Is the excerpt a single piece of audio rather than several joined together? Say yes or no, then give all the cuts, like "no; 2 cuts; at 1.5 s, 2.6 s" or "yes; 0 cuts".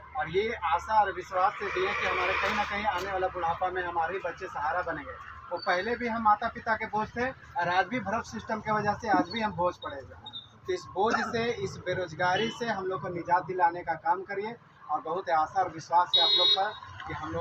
yes; 0 cuts